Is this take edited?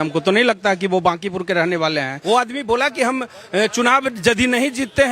yes; 1 cut; at 2.1 s

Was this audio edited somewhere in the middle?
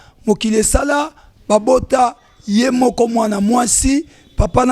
no; 0 cuts

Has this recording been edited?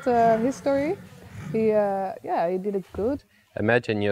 yes; 1 cut; at 3.2 s

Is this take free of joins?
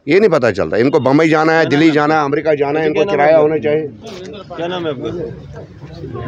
yes; 0 cuts

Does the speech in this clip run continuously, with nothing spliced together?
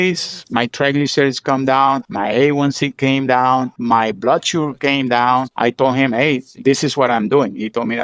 no; 3 cuts; at 2.1 s, 3.7 s, 5.5 s

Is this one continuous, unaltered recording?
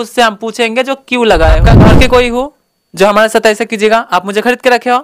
no; 1 cut; at 1.8 s

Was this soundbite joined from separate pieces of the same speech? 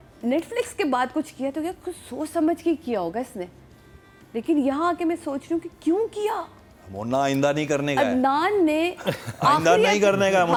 no; 0 cuts

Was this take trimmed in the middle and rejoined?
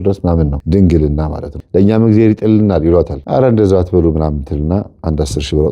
yes; 2 cuts; at 1.6 s, 3.2 s

